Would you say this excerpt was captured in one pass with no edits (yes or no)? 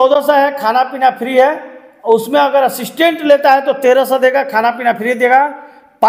yes